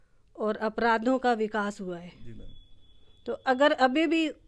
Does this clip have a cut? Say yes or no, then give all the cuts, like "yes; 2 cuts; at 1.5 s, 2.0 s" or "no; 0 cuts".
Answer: no; 0 cuts